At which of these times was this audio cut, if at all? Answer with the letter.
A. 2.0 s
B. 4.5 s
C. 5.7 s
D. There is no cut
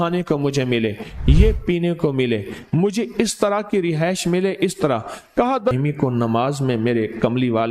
C